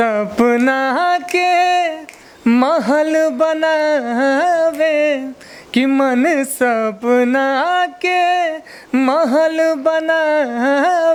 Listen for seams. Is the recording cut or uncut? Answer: uncut